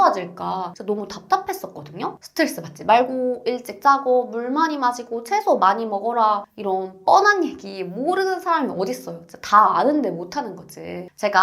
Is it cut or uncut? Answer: cut